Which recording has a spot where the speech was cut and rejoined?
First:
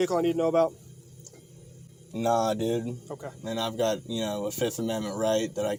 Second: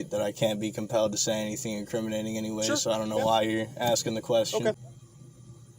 second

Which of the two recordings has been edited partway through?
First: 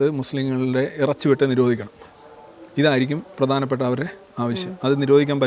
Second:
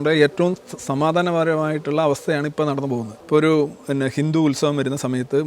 second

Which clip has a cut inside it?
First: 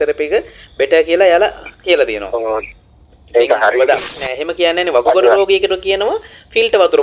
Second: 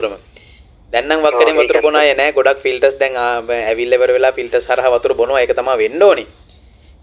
first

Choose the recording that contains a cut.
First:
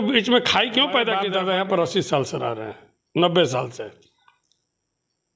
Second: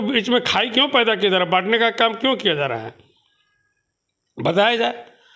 first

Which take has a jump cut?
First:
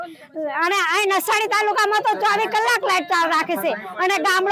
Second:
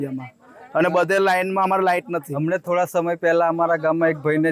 second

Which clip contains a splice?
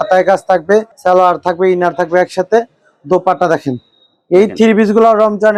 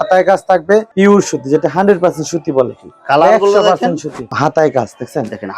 second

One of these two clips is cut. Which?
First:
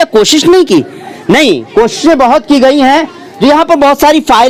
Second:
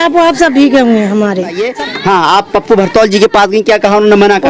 second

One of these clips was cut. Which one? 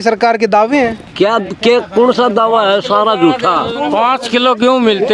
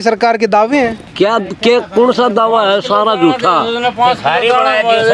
first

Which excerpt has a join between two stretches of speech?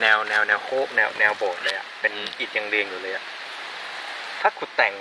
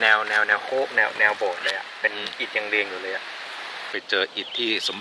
second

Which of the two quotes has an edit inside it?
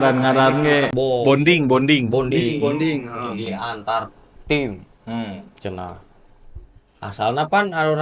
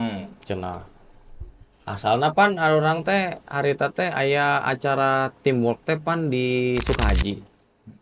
first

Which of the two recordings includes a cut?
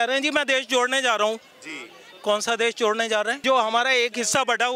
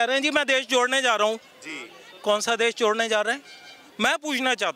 first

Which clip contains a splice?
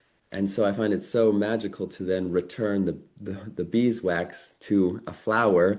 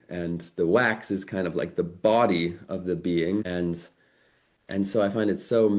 second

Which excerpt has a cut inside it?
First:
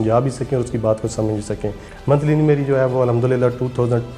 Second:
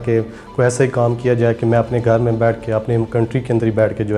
first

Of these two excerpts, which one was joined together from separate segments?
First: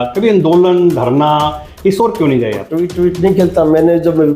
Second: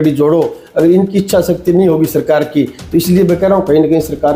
first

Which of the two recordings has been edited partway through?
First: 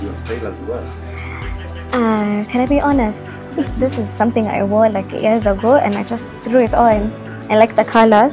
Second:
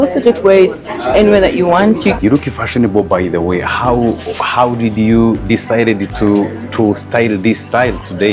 second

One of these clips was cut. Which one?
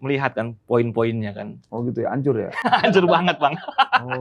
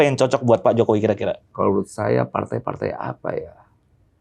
second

